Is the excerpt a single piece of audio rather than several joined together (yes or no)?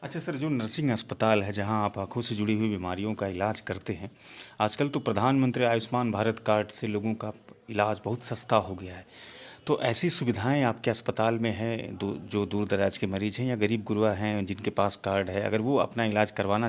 yes